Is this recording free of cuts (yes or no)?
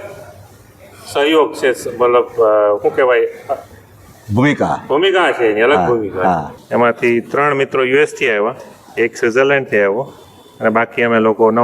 no